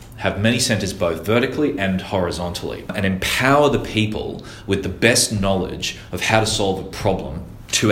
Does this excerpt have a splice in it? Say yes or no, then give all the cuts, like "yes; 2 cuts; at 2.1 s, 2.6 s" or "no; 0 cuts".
yes; 1 cut; at 2.9 s